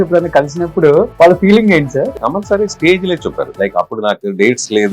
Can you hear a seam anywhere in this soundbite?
yes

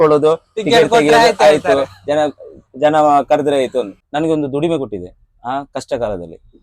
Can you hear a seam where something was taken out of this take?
yes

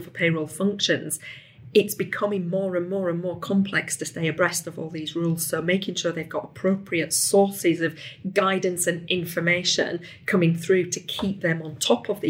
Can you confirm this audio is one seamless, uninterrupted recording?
yes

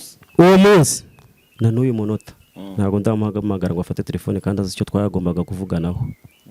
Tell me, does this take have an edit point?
no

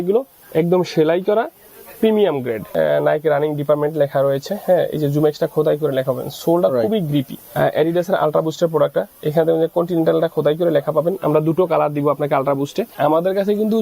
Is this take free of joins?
no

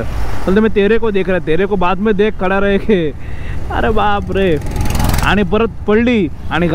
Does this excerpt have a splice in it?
no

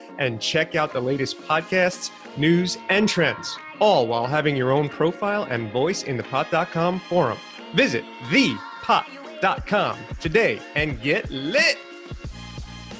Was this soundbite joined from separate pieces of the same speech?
yes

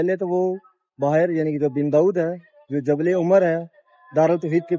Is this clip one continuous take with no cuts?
yes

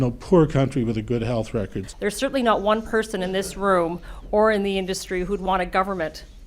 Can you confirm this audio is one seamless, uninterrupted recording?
no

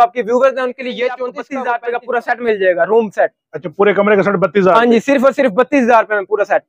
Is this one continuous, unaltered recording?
no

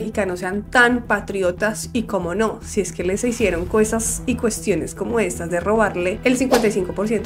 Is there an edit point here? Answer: no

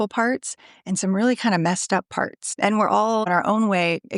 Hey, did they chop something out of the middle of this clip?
yes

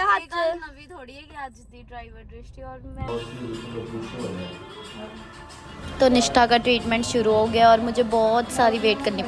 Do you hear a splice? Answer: yes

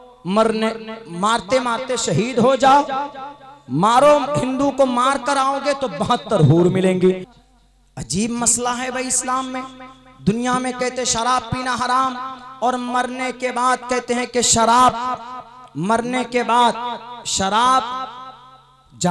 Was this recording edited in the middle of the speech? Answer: yes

